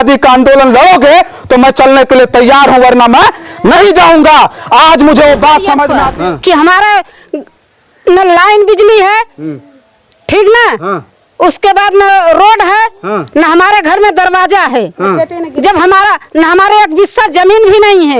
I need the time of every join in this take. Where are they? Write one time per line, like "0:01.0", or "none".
0:06.0